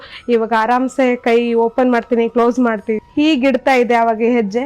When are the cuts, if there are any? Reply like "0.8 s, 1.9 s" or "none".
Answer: 3.0 s